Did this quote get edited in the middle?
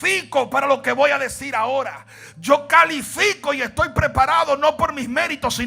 no; 0 cuts

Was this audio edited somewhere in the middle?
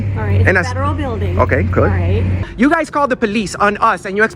yes; 1 cut; at 2.4 s

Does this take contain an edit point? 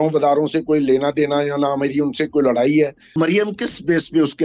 yes; 1 cut; at 3.1 s

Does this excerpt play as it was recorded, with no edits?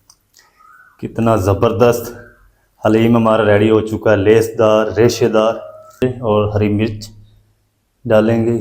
no; 1 cut; at 6.0 s

